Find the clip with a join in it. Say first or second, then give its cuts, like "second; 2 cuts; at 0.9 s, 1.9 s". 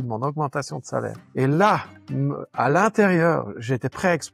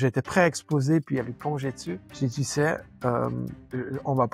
second; 1 cut; at 2.1 s